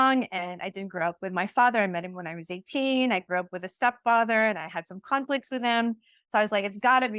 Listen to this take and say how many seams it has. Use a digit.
0